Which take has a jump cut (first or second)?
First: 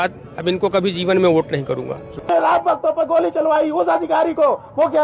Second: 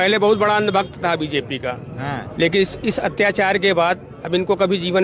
first